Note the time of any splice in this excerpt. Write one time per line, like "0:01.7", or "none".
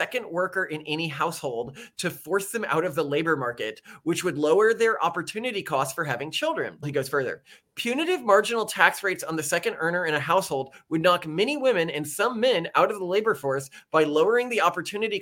0:06.9